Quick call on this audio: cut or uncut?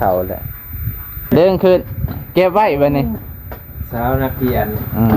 cut